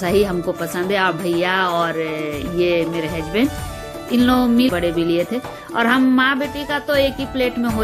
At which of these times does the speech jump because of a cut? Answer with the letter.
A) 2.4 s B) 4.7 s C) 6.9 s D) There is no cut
B